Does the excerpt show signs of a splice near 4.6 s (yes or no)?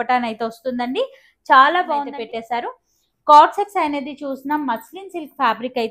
no